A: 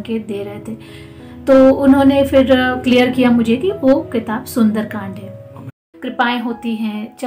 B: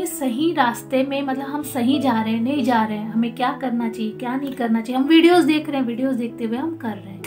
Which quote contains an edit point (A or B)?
A